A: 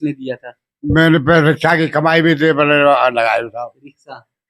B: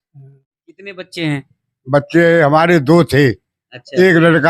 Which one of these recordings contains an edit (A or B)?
B